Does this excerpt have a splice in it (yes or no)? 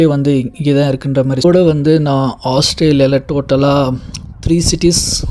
yes